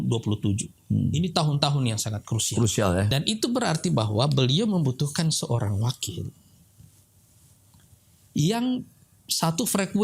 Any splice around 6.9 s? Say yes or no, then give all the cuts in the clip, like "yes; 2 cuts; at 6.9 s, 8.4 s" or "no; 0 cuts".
no; 1 cut; at 3.1 s